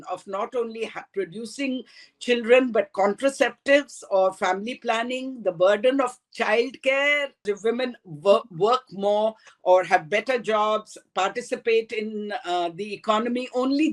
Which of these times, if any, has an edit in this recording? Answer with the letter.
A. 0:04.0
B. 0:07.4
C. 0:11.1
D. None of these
B